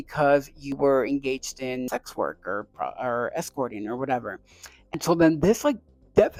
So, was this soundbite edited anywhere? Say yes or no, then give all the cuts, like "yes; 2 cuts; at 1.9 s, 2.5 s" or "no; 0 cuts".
no; 0 cuts